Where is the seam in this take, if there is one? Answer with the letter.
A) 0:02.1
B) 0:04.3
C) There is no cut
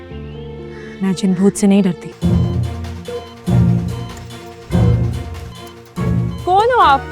A